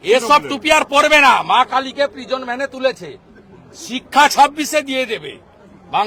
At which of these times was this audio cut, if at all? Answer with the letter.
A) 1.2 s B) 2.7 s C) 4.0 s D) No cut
D